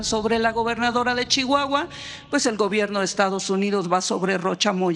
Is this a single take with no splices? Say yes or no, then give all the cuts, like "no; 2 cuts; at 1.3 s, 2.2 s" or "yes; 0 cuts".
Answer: yes; 0 cuts